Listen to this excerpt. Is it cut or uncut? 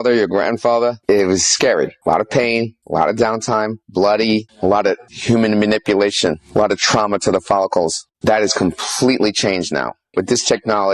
cut